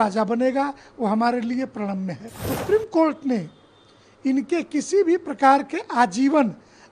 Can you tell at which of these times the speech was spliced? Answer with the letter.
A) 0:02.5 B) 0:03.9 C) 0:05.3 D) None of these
A